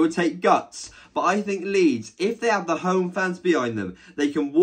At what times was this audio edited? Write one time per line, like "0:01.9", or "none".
none

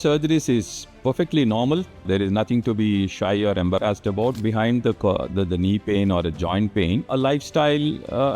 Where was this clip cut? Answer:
0:02.1
0:04.4
0:07.1

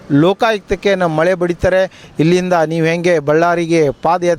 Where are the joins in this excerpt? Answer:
0:02.0

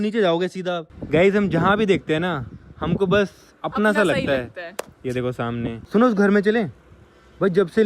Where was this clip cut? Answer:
0:00.9
0:05.8

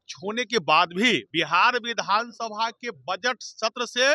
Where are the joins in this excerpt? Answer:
0:01.3

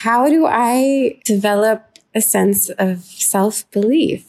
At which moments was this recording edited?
0:01.2

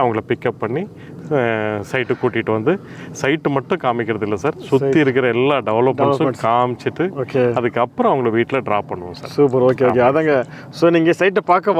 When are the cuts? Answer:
none

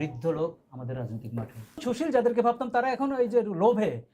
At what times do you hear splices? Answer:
0:01.8

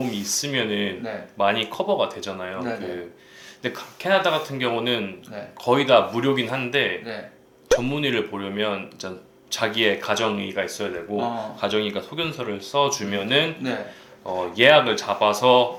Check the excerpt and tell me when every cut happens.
none

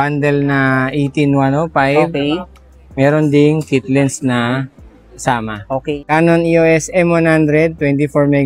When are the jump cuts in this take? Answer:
0:06.0

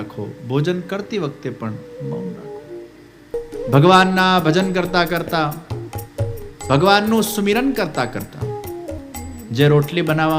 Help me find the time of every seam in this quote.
0:03.5
0:09.1

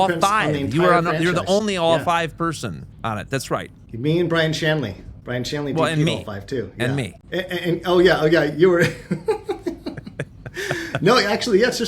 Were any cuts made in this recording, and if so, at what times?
0:02.9
0:05.2
0:07.2

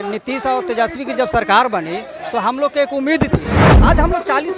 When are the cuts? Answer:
0:03.7

